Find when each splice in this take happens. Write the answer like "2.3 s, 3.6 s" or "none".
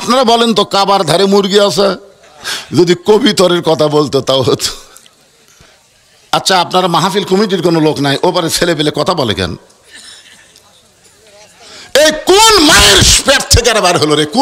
5.7 s